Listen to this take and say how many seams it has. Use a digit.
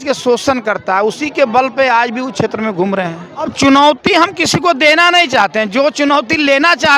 1